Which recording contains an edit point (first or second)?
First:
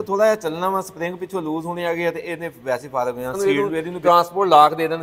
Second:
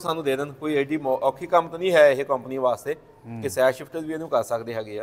first